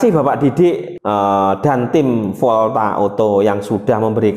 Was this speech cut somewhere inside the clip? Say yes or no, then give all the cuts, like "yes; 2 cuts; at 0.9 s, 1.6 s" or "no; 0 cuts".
yes; 1 cut; at 0.9 s